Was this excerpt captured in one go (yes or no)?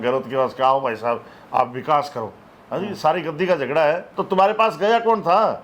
no